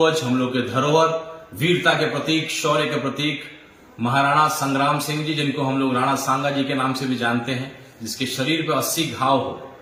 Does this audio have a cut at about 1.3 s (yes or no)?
no